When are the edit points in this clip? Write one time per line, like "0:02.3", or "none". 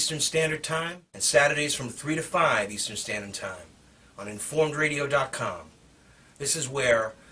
none